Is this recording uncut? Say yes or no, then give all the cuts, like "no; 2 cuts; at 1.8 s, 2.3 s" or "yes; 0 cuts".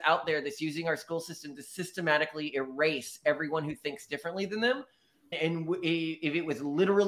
no; 1 cut; at 5.3 s